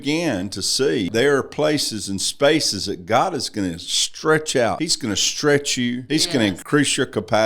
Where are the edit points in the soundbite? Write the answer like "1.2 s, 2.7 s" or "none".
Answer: 1.1 s, 4.9 s, 6.4 s